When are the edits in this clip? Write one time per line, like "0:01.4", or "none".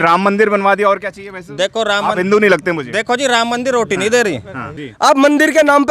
0:04.7

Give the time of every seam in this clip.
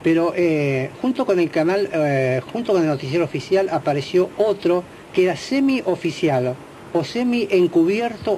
0:06.8

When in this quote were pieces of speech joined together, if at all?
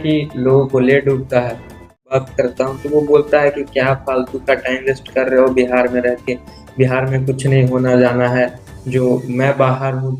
0:02.1

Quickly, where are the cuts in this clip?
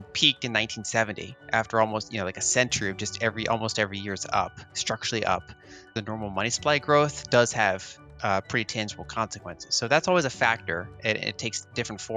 0:05.9

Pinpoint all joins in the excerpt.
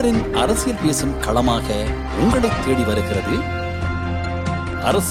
none

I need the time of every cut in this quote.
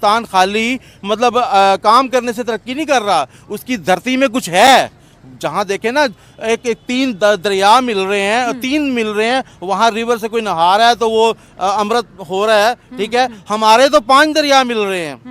none

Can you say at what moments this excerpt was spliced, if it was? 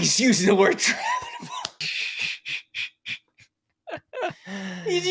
none

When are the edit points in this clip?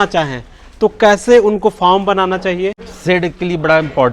0:02.8

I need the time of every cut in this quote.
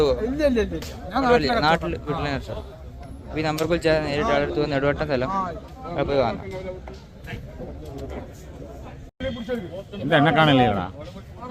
none

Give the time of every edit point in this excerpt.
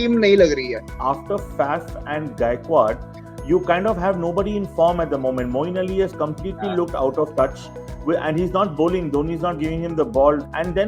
none

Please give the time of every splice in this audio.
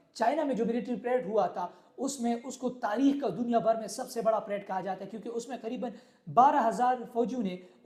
none

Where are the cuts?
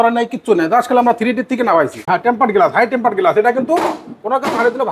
0:02.0

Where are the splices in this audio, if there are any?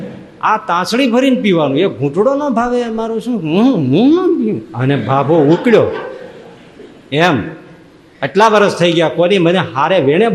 0:04.7

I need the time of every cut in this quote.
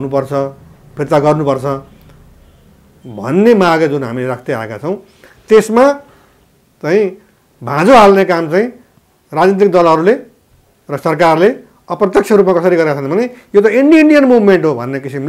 none

